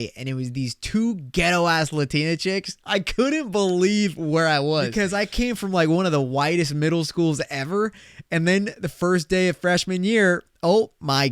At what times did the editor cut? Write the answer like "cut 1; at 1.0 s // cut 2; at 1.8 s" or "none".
cut 1; at 4.9 s